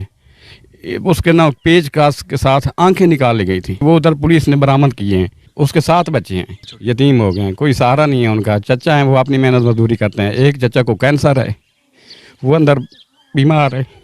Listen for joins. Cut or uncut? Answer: cut